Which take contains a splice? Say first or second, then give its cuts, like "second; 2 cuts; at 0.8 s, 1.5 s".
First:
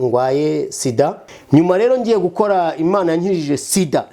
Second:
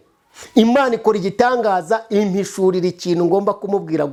first; 1 cut; at 1.3 s